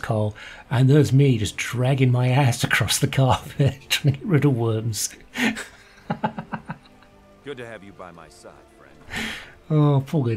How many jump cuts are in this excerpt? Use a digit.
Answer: 0